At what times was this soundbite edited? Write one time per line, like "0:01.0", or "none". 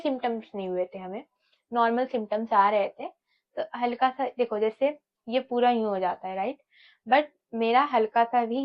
none